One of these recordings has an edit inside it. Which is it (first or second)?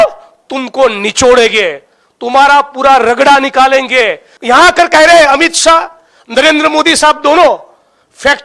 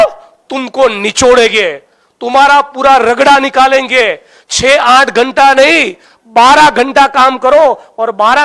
first